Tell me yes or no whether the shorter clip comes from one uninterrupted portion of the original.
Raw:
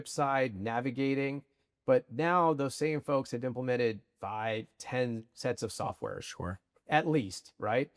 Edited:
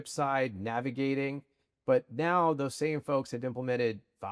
yes